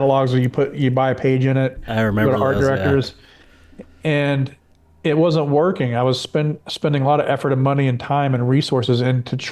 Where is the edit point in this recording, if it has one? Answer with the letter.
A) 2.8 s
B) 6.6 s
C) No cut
C